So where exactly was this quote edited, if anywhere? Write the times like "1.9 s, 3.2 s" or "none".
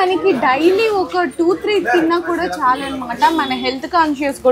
none

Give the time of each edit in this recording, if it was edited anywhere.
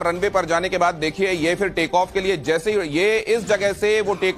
3.4 s

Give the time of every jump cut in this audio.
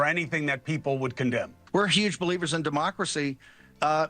1.6 s

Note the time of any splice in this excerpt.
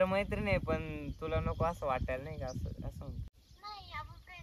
3.3 s

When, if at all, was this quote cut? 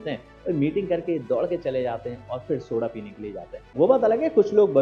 3.7 s

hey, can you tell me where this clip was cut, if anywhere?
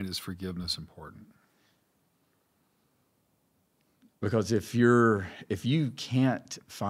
none

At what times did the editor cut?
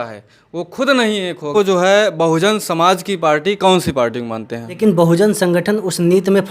1.5 s, 4.8 s

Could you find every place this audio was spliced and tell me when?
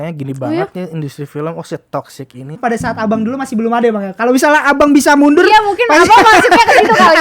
2.6 s

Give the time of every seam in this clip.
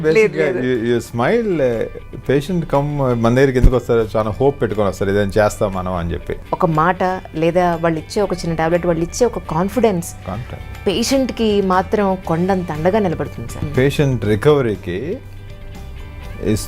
6.4 s, 13.6 s

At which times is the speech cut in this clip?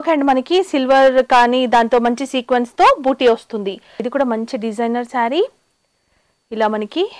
4.0 s

